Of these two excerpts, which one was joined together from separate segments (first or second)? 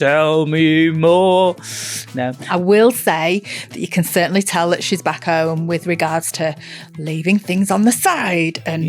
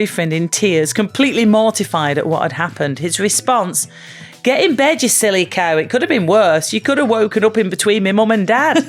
first